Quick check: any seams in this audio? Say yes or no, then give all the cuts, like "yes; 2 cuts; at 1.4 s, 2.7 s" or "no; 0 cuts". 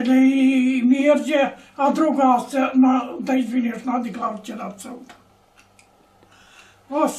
no; 0 cuts